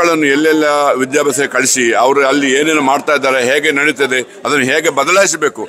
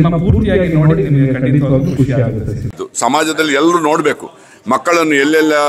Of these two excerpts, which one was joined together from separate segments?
second; 1 cut; at 2.8 s

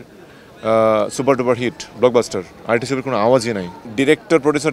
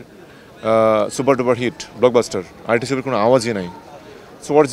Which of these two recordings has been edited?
first; 1 cut; at 3.8 s

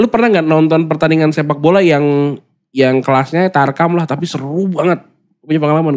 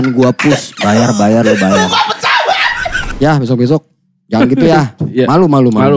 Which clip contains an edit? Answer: second; 1 cut; at 3.1 s

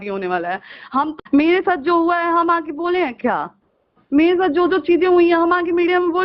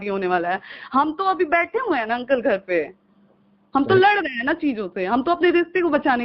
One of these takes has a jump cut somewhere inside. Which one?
first; 1 cut; at 1.2 s

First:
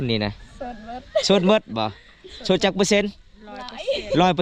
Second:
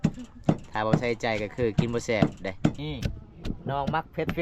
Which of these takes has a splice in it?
second; 1 cut; at 2.8 s

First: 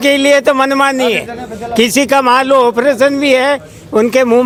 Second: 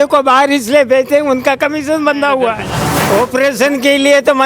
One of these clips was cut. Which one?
second; 1 cut; at 2.9 s

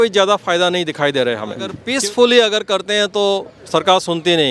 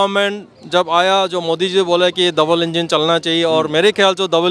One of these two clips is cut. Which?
first; 1 cut; at 1.8 s

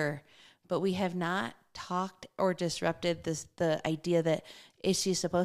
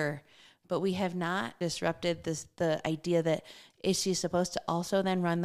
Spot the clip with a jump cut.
second; 1 cut; at 1.6 s

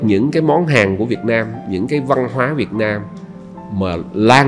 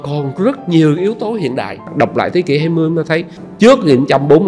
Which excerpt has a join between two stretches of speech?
second; 2 cuts; at 1.8 s, 3.4 s

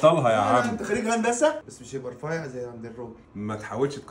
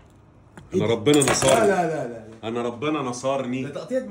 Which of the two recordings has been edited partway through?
first; 1 cut; at 1.7 s

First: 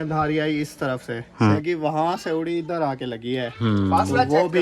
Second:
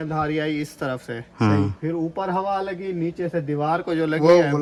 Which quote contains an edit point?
first; 1 cut; at 1.6 s

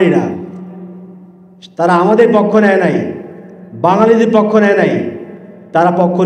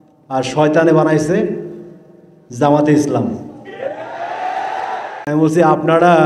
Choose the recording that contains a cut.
second; 1 cut; at 5.1 s

